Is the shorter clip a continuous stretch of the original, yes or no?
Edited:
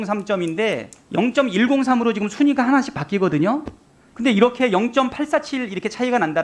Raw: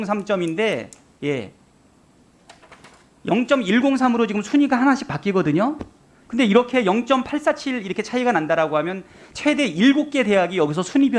no